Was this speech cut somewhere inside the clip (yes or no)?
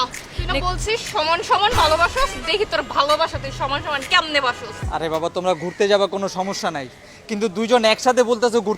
yes